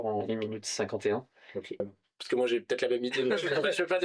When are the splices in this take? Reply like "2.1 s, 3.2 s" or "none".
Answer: 1.9 s